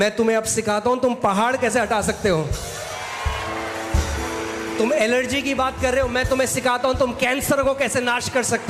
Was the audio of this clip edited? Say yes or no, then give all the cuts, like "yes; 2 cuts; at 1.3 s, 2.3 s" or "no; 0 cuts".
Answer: no; 0 cuts